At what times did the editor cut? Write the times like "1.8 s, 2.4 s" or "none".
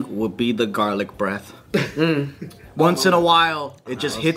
none